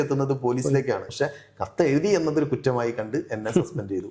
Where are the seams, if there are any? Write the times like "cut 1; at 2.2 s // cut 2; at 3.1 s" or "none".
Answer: cut 1; at 1.1 s